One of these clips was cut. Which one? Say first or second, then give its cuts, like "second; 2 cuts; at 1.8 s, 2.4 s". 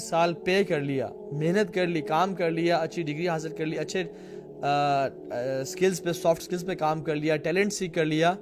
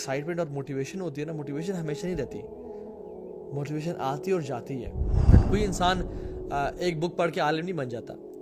second; 1 cut; at 5.3 s